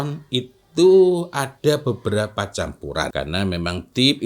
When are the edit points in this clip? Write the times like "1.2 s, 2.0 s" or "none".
3.1 s

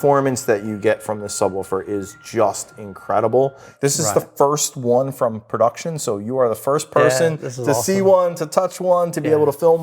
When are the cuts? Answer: 3.7 s

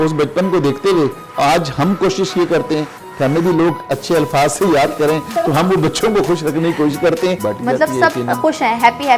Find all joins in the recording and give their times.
7.4 s

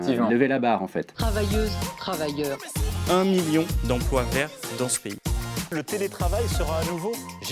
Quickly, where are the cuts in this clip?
1.2 s

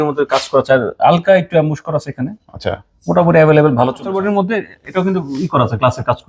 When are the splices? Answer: 4.2 s

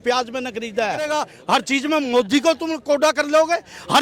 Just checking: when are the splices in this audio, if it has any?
1.3 s

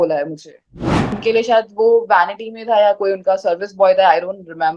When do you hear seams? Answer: 1.1 s

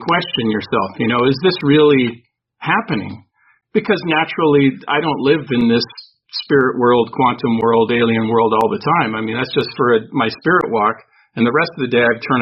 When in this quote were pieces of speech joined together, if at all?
none

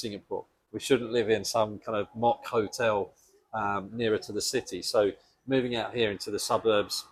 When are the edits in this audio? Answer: none

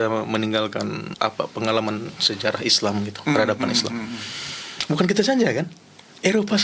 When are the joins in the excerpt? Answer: 1.1 s

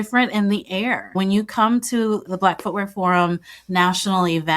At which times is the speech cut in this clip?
1.1 s, 2.3 s

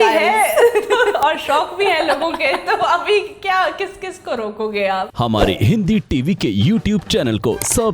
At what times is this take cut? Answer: 5.1 s

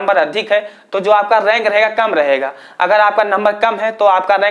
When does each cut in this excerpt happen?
none

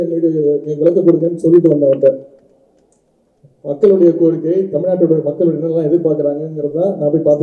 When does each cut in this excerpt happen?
none

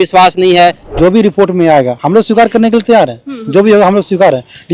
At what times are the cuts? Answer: 0.9 s

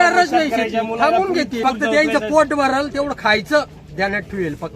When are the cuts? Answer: 1.6 s

